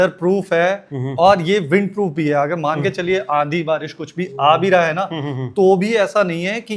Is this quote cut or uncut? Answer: uncut